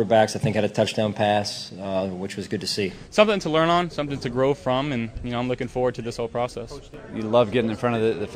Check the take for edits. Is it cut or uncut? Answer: cut